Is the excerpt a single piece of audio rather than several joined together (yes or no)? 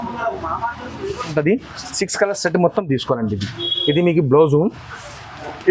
no